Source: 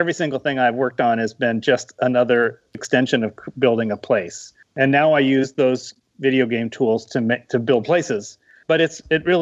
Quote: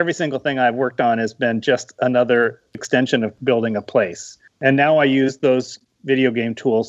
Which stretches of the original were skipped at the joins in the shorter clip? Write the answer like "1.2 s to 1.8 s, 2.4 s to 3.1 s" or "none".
3.4 s to 3.5 s